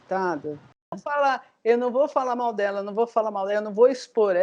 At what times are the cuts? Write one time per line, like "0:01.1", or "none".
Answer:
0:01.0